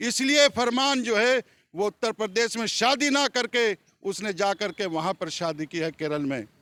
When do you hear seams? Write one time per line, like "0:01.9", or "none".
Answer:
none